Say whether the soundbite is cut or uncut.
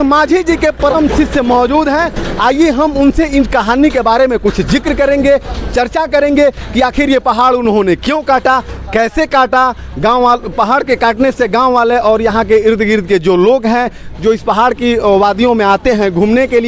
uncut